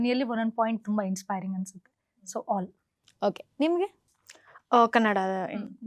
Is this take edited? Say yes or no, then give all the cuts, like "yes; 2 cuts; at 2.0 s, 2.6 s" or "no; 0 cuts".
no; 0 cuts